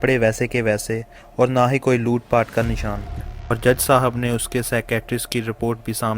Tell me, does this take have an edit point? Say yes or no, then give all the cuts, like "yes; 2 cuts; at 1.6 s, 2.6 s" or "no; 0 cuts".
yes; 1 cut; at 3.1 s